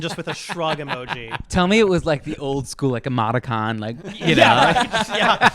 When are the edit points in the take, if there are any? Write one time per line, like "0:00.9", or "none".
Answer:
0:01.3
0:04.2